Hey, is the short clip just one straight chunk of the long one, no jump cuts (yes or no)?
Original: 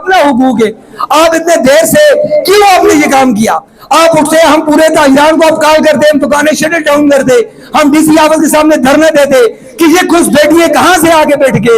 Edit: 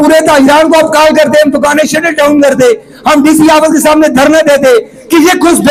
yes